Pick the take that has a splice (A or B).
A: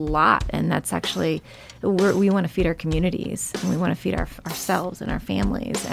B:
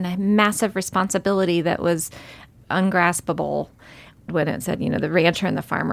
B